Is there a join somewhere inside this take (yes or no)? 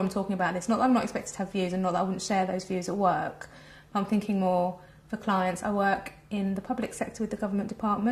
yes